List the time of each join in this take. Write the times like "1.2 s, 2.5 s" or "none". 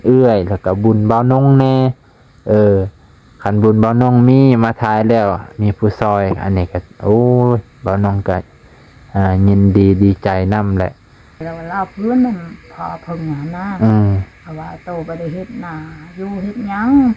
11.4 s